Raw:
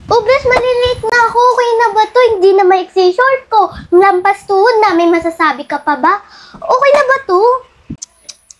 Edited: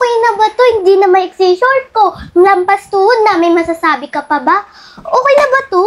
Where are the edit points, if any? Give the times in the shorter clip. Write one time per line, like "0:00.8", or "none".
none